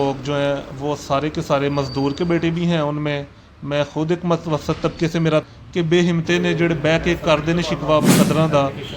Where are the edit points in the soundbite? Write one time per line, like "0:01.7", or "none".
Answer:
0:05.4